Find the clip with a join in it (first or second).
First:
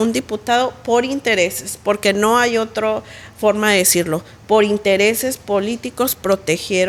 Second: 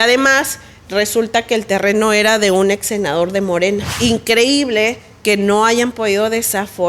second